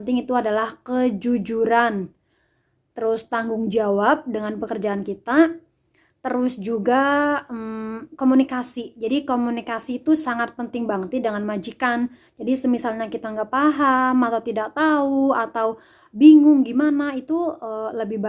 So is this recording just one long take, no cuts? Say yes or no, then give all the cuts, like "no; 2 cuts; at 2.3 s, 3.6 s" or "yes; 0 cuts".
yes; 0 cuts